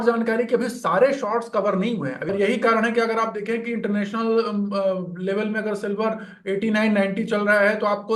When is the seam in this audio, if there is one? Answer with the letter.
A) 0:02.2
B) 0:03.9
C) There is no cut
A